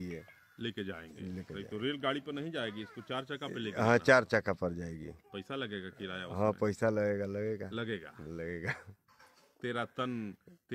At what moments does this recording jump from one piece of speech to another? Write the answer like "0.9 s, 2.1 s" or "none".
none